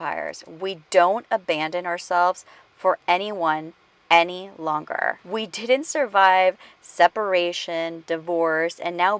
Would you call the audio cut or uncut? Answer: cut